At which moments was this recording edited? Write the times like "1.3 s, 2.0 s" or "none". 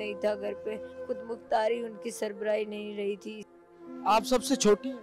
0.9 s, 3.6 s

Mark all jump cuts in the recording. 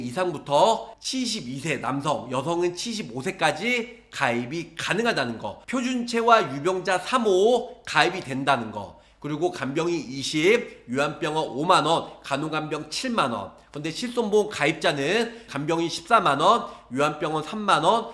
5.5 s, 15.4 s

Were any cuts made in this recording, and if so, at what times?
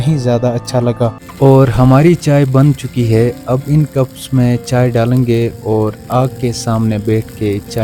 1.2 s

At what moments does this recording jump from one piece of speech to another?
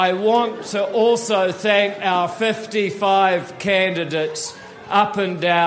none

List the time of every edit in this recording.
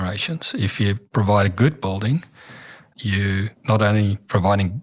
1.1 s, 3.2 s

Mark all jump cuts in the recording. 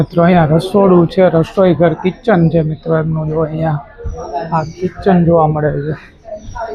none

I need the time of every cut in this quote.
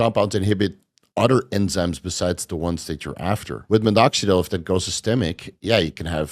3.5 s

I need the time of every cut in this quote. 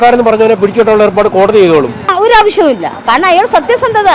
2.0 s

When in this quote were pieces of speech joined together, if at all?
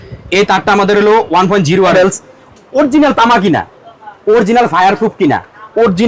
1.9 s

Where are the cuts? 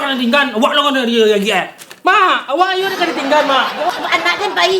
3.9 s

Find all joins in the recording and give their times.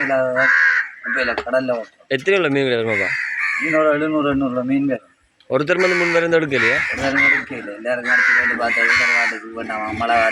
none

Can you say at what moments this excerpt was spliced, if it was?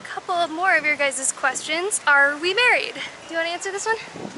2.0 s

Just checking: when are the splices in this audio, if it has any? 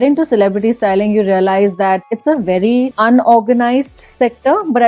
2.0 s, 2.9 s

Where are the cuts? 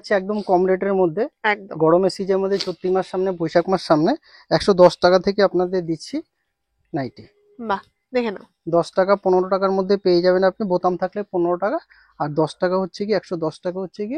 none

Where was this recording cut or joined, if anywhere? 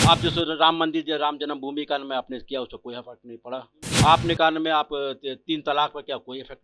3.8 s

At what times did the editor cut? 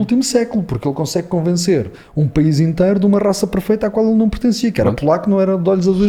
none

